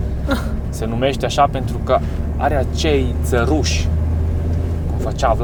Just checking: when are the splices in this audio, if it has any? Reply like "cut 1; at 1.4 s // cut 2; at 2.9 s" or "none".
none